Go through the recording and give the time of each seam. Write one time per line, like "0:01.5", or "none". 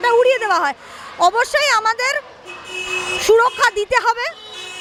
none